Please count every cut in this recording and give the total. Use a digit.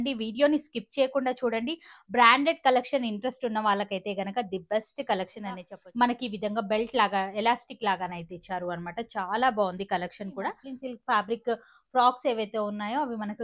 2